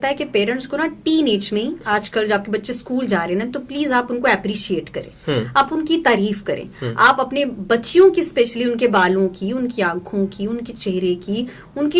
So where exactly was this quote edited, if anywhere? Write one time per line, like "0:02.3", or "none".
none